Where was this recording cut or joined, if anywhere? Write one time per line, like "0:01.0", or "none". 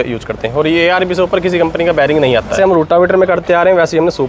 0:02.5